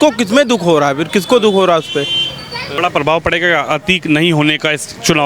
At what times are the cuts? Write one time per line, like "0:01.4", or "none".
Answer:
0:02.8